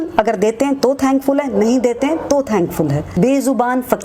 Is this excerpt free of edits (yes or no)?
no